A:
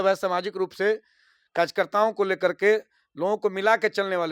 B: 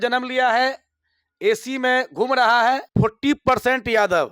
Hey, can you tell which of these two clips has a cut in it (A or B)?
B